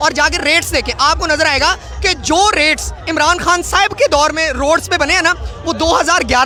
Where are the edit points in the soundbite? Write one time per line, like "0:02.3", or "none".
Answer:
none